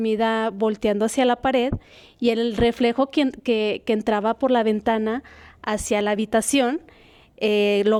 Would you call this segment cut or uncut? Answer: uncut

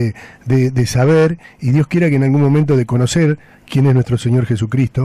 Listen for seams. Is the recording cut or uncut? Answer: uncut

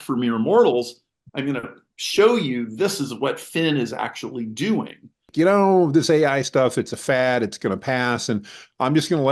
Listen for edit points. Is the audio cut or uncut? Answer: cut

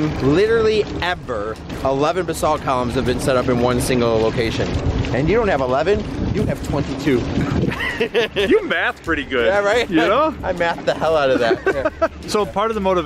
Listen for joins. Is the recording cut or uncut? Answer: uncut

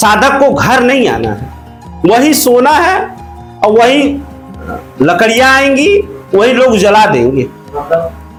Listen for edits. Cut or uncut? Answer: uncut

